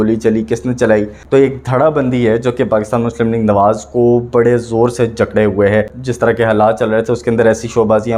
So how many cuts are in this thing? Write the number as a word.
two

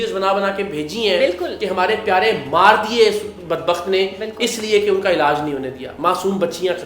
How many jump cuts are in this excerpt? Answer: zero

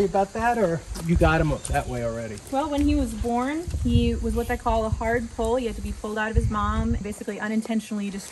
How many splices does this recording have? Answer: three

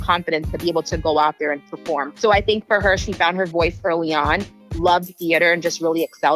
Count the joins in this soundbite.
one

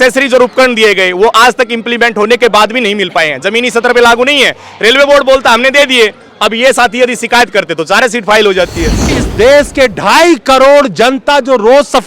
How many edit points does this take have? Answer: one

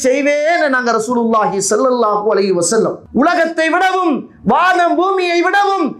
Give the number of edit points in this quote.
one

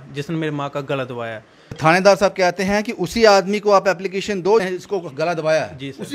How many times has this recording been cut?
two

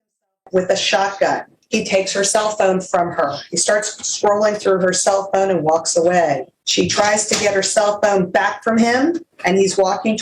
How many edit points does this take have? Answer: three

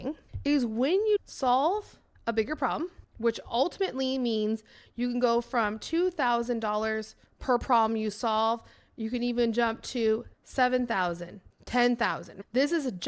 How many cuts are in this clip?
zero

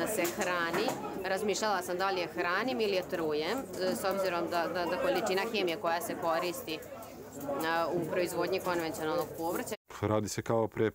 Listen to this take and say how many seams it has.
one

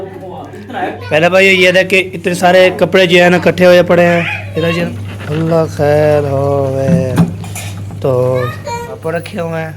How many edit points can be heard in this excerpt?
three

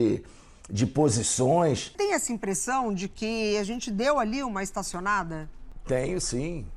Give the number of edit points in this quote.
one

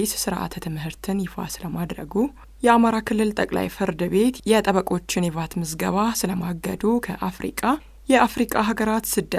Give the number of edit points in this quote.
one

